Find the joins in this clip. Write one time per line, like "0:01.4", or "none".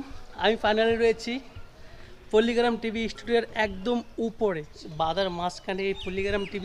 0:04.8